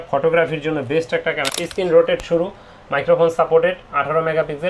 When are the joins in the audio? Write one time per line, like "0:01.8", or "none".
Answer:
0:01.4